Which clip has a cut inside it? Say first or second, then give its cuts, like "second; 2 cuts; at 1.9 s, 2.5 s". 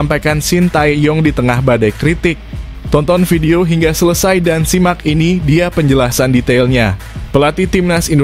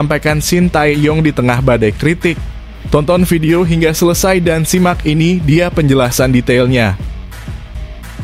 second; 1 cut; at 7.2 s